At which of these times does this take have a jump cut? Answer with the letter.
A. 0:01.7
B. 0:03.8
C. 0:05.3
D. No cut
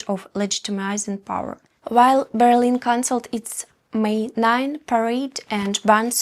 A